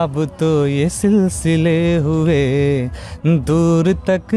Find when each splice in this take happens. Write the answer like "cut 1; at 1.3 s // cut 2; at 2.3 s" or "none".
none